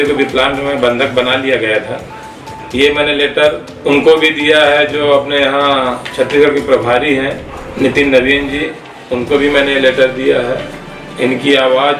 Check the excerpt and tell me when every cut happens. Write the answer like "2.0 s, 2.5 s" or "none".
none